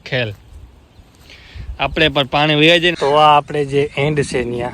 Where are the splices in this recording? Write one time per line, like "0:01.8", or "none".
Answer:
0:02.9